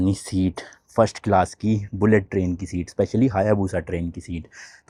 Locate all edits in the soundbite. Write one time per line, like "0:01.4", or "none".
none

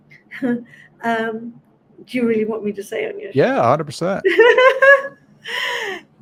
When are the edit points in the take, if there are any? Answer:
none

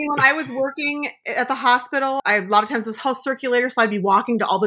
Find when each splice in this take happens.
0:01.2
0:02.2

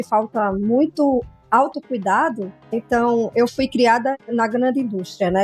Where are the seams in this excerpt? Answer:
0:02.8
0:04.3

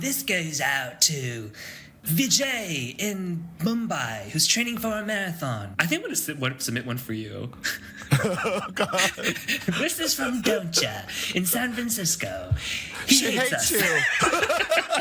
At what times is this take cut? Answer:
0:01.9
0:05.7

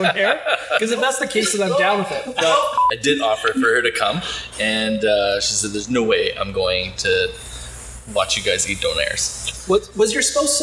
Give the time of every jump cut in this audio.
0:02.8

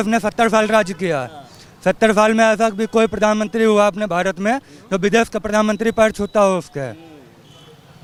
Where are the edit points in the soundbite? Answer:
none

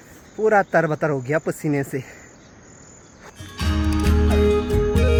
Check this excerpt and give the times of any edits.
none

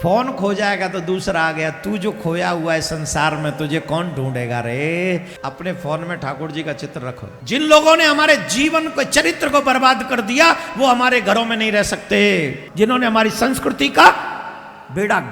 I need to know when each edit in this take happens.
0:05.3
0:07.3
0:12.6

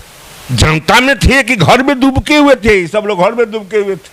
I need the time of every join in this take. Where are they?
none

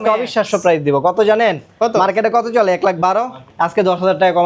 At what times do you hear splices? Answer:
0:03.5

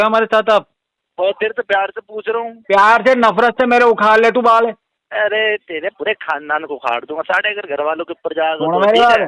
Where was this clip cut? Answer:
0:01.0
0:04.9

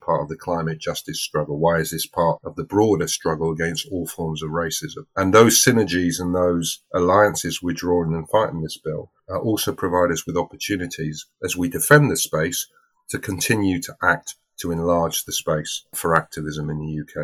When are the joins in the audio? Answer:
0:15.8

